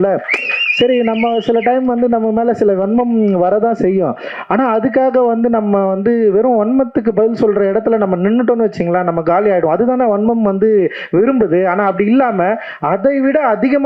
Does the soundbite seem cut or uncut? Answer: uncut